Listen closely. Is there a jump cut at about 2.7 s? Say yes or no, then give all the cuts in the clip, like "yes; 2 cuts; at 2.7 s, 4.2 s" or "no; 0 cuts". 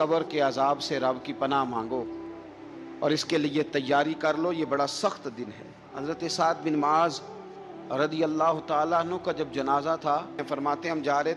no; 2 cuts; at 5.9 s, 10.4 s